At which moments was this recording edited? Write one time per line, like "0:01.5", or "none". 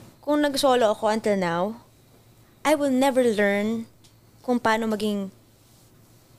none